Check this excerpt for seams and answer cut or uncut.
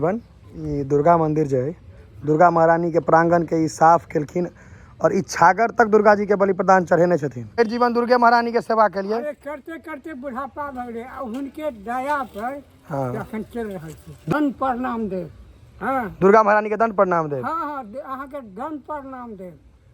cut